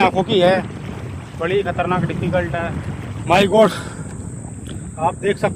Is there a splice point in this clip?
yes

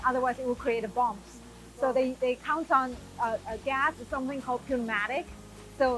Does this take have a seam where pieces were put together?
no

